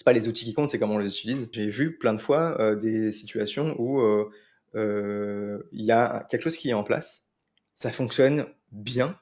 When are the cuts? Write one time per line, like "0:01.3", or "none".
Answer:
0:01.5